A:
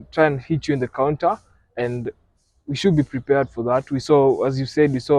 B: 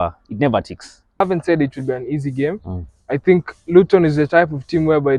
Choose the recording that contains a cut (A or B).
B